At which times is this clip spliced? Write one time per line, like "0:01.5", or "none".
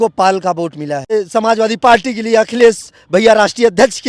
0:01.1